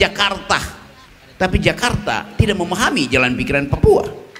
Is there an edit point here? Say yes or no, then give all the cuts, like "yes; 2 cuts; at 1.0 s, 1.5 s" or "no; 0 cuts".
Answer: no; 0 cuts